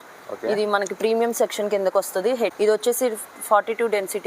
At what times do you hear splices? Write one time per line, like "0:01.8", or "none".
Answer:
0:02.5